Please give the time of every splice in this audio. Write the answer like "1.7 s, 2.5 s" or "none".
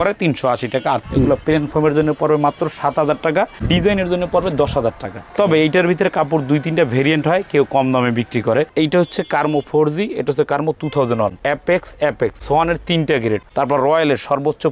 1.0 s, 8.7 s, 11.4 s, 12.4 s, 13.5 s